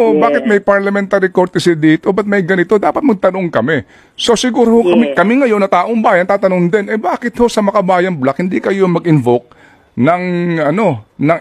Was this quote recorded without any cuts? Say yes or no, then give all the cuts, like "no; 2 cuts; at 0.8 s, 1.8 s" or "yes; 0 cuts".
yes; 0 cuts